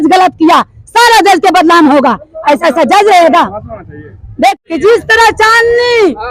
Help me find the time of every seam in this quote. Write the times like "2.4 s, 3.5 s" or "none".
4.6 s